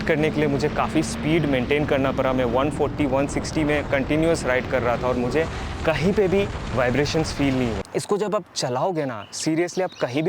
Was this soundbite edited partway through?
yes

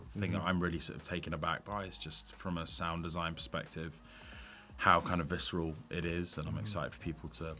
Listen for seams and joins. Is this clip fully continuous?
yes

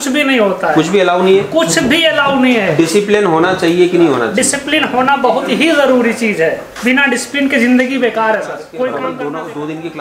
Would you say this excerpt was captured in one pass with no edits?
no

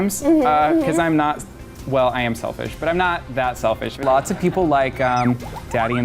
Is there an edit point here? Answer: yes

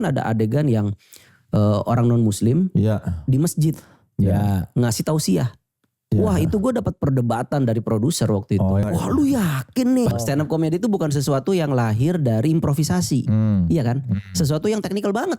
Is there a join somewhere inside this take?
yes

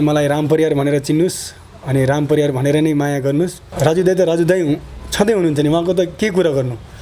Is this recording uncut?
no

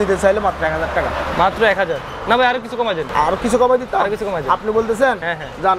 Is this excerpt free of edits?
no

